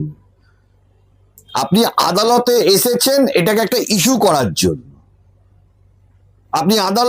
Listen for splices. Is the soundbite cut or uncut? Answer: uncut